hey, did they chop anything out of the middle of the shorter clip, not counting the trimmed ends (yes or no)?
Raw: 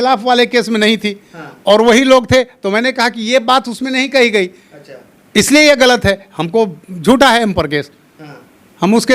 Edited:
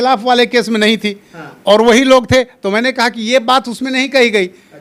no